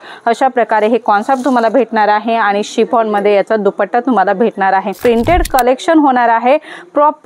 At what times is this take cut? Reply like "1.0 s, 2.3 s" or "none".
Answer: 4.9 s